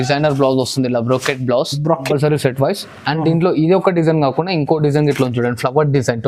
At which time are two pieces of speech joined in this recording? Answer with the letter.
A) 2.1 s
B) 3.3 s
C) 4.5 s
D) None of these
A